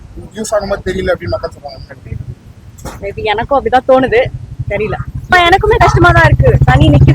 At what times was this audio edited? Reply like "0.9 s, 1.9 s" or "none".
5.3 s